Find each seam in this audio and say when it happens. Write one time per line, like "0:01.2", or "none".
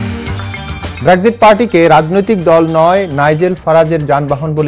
0:00.9